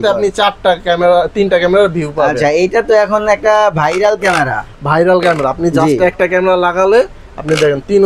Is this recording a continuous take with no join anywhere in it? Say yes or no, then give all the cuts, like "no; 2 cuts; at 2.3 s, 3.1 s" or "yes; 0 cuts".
yes; 0 cuts